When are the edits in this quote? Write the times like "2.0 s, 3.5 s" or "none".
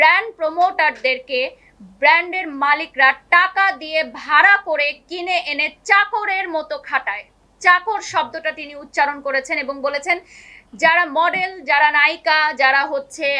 none